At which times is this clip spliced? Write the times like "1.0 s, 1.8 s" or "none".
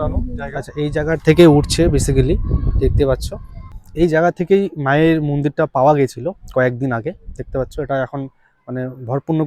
3.8 s